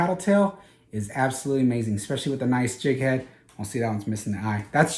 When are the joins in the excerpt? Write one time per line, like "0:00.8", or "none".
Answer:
none